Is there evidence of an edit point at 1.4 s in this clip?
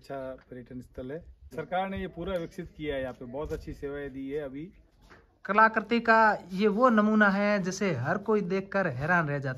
yes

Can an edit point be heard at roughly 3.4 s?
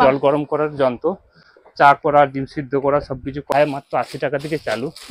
yes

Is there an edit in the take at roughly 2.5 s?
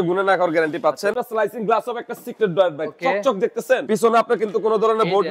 no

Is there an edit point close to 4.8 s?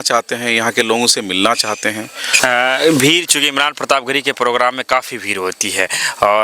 no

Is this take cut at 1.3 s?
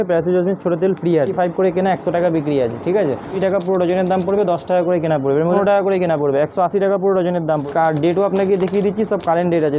yes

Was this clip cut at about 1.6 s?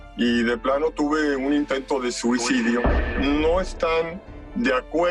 no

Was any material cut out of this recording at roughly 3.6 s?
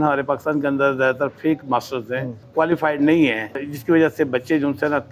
yes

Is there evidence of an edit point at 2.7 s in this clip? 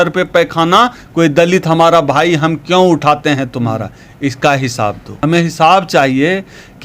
no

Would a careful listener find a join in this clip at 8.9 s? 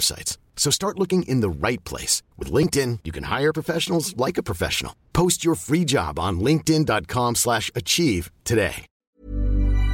yes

